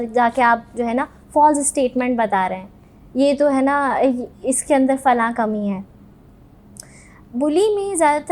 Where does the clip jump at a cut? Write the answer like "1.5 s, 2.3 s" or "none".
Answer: none